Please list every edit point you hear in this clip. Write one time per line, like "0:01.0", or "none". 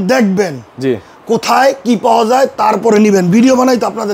none